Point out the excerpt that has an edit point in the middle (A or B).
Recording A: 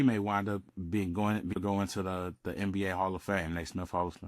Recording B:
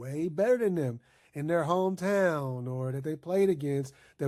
A